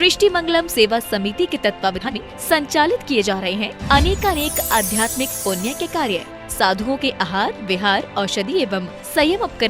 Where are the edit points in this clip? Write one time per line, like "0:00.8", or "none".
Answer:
0:02.1